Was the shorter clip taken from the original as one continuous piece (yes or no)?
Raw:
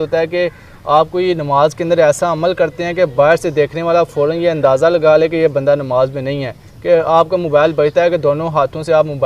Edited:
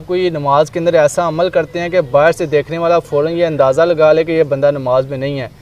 yes